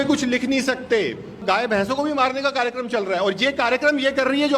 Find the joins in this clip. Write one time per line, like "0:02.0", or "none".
0:01.4